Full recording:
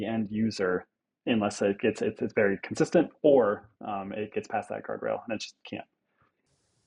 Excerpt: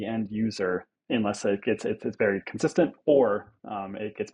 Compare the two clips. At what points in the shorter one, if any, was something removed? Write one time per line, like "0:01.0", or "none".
0:00.9